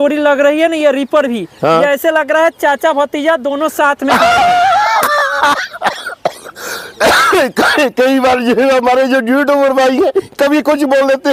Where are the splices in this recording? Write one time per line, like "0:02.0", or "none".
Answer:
none